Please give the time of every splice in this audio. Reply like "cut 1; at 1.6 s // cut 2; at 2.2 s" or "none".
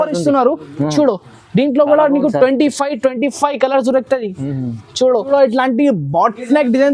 cut 1; at 5.2 s